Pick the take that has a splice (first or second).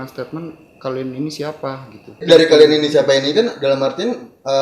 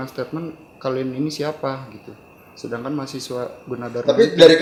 first